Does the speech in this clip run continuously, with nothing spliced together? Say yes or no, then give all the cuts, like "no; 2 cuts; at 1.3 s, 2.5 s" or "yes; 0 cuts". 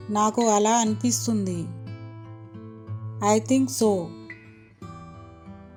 yes; 0 cuts